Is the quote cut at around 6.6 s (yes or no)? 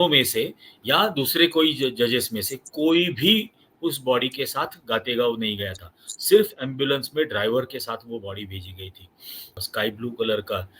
no